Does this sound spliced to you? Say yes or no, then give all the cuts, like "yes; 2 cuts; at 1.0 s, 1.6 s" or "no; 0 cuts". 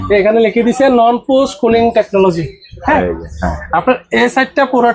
no; 0 cuts